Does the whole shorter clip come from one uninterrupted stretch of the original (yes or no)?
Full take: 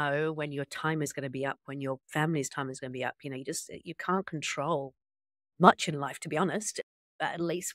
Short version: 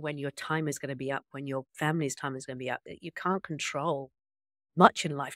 no